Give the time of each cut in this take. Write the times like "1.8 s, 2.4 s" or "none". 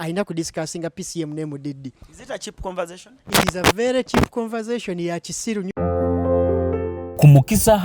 5.7 s